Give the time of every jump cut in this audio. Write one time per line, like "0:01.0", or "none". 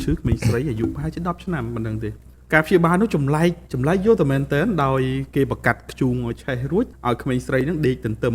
0:02.3
0:07.0